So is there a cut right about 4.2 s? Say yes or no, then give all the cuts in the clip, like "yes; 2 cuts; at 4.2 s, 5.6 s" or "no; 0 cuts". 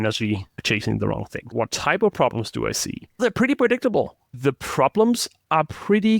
yes; 3 cuts; at 1.5 s, 3.2 s, 4.2 s